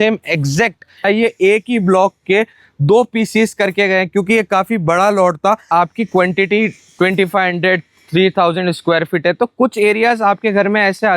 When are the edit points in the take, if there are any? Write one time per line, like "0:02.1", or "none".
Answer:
0:01.0
0:05.6

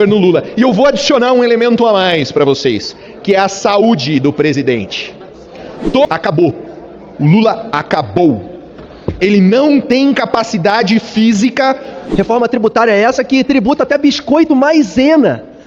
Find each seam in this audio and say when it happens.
0:06.1
0:12.0

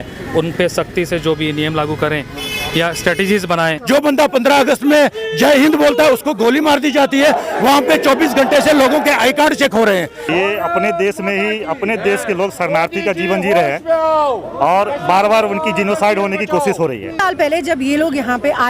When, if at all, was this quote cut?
0:03.8
0:10.2
0:17.2

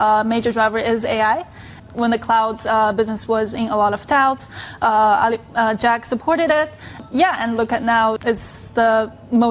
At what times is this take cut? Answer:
0:01.8
0:07.0
0:08.2

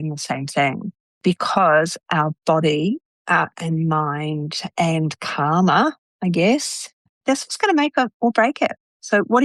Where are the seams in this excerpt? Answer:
none

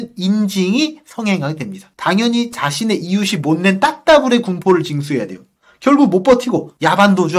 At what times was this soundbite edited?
0:01.9

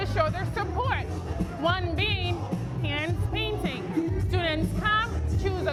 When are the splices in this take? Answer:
none

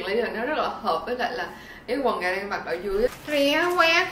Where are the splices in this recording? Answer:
0:03.2

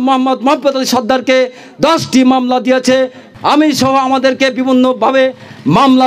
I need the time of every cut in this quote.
0:03.2

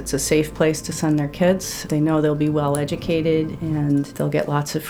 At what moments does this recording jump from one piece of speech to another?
0:01.8
0:04.1

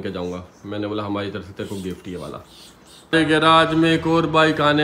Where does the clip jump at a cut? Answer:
0:03.1

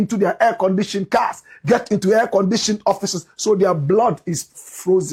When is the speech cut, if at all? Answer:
none

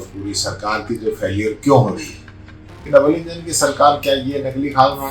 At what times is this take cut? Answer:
0:02.8

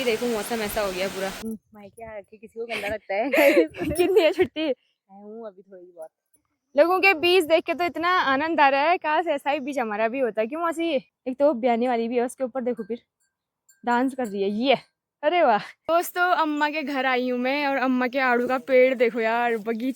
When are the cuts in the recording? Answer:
0:01.4
0:06.5
0:11.2
0:15.7

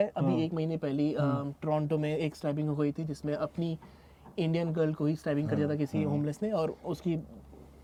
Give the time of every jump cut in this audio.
none

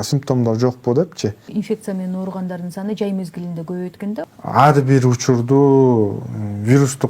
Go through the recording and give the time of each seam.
0:01.4
0:04.2

